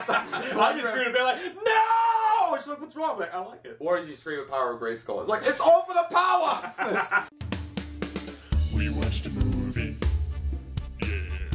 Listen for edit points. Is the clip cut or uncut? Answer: cut